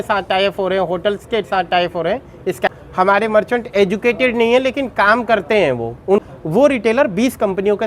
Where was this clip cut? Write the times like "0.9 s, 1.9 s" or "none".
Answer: 2.7 s, 6.2 s